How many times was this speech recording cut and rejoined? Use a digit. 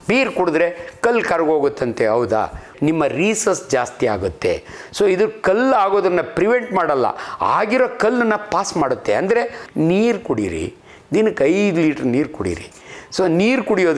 2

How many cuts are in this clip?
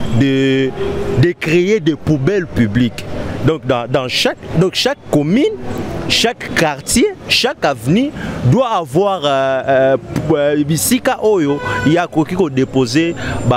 0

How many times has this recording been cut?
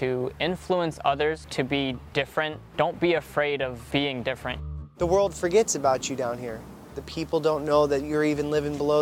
5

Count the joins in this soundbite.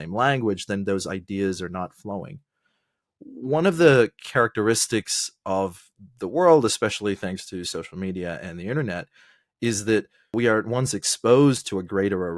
1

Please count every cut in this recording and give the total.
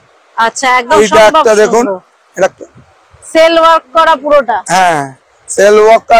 1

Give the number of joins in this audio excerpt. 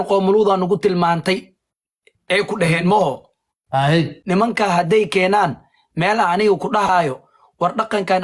1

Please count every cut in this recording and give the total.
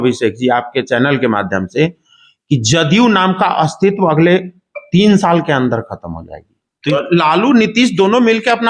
1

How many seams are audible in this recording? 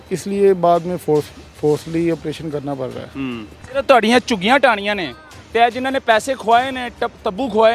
1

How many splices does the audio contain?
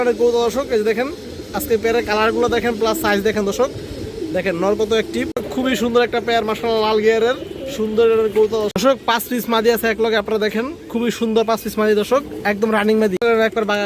3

